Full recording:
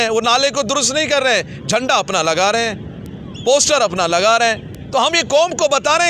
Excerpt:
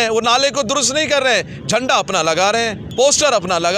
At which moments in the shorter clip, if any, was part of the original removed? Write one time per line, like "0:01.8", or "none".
0:02.8